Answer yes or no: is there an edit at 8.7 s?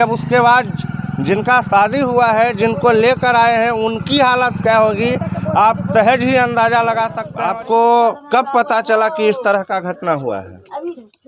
no